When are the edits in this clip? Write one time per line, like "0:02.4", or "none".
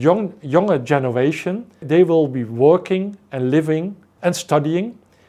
0:01.8
0:04.1